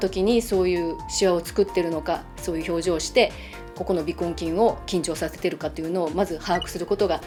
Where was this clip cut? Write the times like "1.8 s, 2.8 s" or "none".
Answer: none